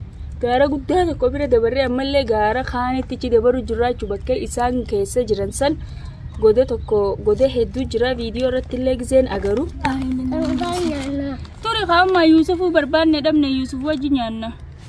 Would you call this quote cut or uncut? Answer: cut